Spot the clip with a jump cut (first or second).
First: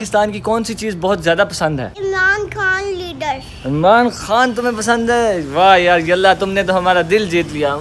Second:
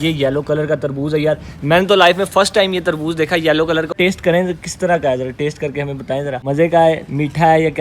second